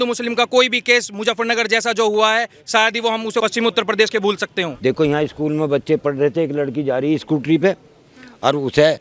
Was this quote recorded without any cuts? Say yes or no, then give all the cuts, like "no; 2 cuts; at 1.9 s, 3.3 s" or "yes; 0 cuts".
no; 2 cuts; at 3.4 s, 4.7 s